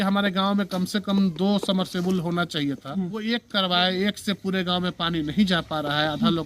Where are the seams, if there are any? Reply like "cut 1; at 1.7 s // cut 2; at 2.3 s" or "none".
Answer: cut 1; at 3.1 s